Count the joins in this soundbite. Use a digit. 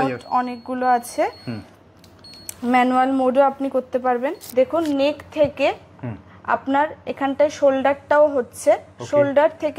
1